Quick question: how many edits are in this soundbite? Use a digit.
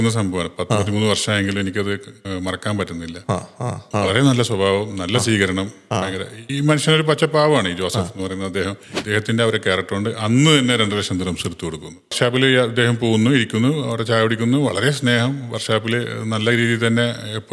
3